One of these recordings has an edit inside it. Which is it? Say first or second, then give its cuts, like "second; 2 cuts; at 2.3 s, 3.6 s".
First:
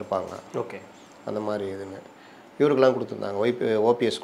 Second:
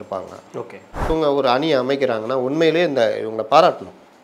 second; 1 cut; at 1.1 s